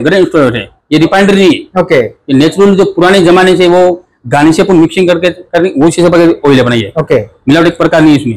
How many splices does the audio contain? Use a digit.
0